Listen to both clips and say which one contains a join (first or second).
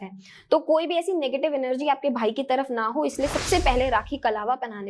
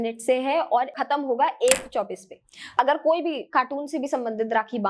second